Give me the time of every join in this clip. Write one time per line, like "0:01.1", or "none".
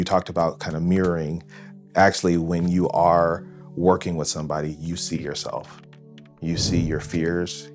none